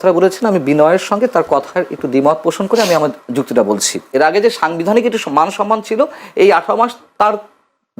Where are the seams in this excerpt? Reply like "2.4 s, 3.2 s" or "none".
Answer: 4.0 s